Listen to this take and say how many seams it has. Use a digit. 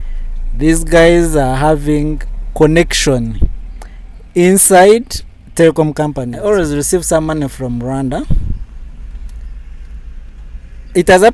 1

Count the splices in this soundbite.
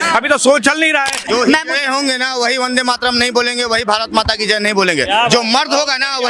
1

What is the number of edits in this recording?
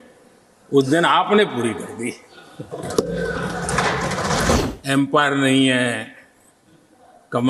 1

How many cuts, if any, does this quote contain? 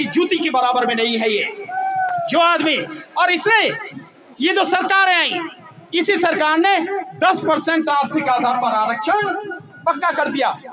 0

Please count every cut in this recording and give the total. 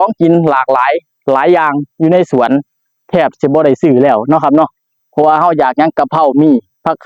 0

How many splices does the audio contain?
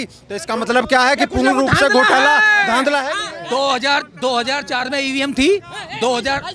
0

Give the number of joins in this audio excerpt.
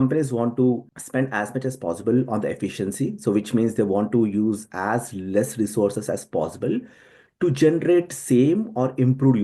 1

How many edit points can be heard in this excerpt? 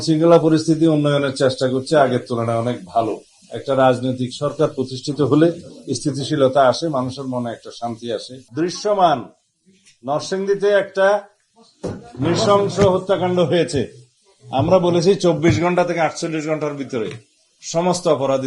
1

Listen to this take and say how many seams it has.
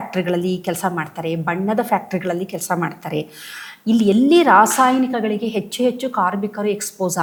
0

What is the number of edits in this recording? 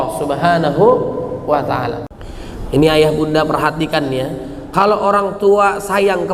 1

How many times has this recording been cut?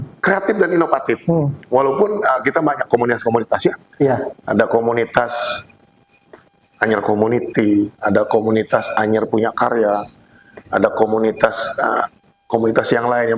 0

